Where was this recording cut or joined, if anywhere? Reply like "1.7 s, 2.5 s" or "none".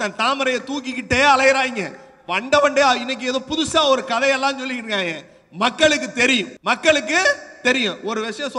6.5 s